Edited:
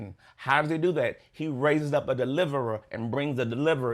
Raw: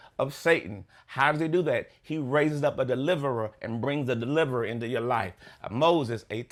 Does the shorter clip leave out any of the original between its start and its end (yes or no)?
no